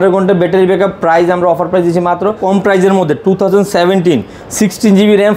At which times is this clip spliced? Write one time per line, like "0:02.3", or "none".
0:02.4